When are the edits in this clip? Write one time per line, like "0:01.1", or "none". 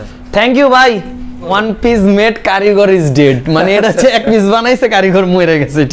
0:01.5